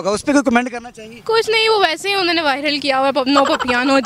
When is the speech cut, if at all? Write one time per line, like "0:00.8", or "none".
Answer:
none